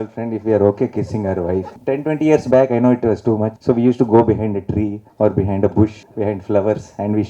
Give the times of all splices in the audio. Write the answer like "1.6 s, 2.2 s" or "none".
1.7 s, 3.5 s, 5.0 s, 6.0 s